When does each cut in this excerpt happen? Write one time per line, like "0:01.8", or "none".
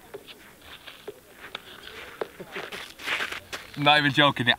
0:02.7